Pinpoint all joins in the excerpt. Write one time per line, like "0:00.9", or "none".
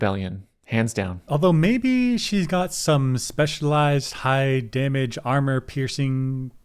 0:01.2